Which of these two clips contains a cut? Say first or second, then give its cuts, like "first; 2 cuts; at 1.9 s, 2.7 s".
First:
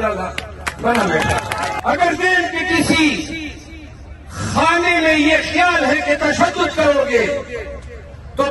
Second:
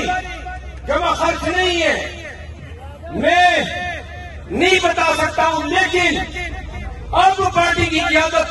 first; 1 cut; at 1.7 s